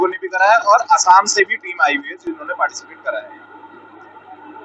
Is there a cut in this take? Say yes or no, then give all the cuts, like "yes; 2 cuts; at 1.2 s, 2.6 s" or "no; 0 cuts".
no; 0 cuts